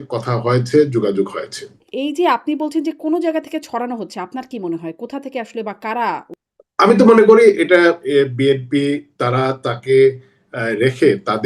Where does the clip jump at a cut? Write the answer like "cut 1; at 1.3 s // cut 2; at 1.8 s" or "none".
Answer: cut 1; at 1.8 s // cut 2; at 6.4 s